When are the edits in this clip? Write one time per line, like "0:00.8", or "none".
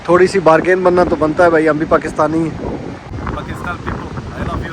0:03.1